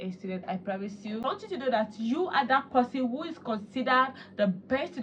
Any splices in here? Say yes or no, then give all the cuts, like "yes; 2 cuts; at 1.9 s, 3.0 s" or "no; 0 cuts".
yes; 1 cut; at 1.2 s